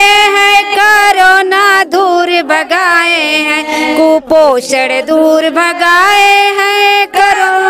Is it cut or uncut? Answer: uncut